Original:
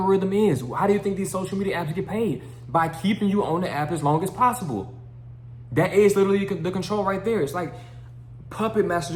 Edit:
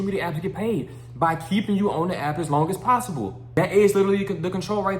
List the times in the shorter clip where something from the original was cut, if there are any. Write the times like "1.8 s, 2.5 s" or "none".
3.4 s